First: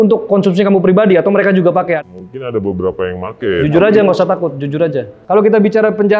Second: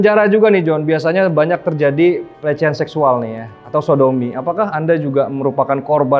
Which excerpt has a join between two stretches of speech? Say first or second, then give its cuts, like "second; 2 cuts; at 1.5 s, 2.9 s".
first; 2 cuts; at 2.0 s, 5.1 s